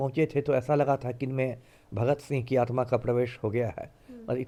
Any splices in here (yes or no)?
no